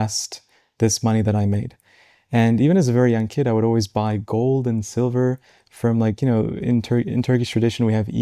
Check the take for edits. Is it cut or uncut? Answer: uncut